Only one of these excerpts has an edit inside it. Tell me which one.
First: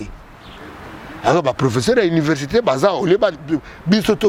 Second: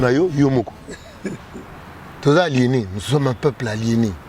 second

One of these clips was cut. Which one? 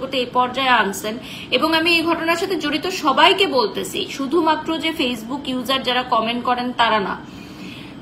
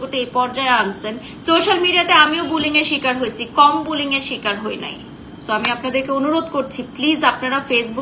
second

